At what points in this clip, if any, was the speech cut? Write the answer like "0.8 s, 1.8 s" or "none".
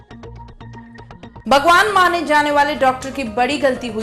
1.3 s